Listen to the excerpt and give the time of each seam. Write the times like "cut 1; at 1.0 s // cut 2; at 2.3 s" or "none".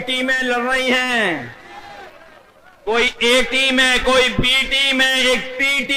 none